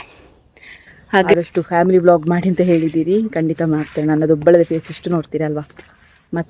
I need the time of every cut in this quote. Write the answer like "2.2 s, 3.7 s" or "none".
1.3 s